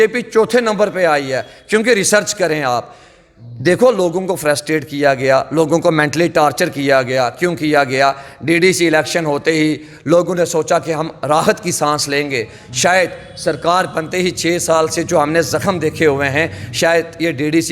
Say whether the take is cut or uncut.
uncut